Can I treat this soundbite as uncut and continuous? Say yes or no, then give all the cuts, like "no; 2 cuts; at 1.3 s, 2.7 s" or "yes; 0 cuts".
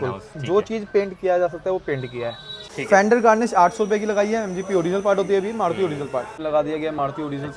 no; 2 cuts; at 2.7 s, 6.4 s